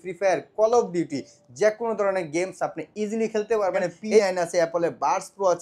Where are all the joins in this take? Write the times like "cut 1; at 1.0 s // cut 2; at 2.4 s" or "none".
cut 1; at 4.2 s